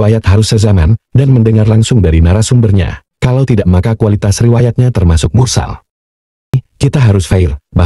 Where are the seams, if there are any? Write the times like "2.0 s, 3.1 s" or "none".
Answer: 6.6 s